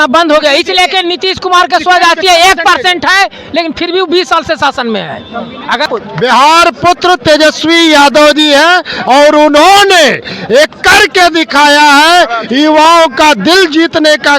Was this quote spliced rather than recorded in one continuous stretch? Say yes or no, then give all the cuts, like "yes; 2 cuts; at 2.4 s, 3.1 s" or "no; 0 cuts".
yes; 1 cut; at 5.9 s